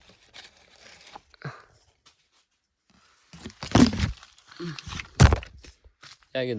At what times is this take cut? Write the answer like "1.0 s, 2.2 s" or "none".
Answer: none